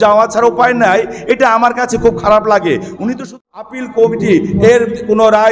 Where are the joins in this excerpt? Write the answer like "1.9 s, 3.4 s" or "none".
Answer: 3.4 s